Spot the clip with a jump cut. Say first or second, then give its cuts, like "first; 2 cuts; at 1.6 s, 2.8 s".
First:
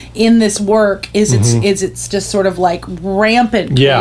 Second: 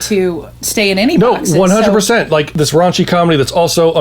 second; 1 cut; at 2.5 s